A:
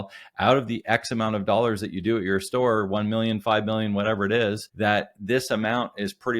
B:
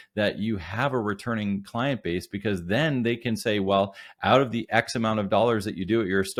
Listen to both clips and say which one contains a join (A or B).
A